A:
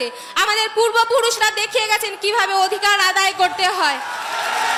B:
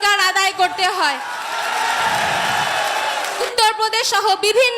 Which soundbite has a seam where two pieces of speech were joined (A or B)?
B